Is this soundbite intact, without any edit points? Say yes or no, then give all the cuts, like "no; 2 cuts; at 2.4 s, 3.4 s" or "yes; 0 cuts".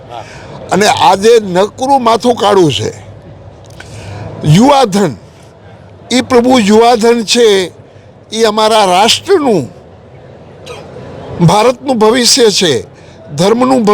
yes; 0 cuts